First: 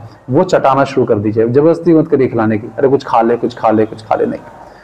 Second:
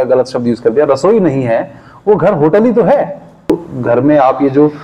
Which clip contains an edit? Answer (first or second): second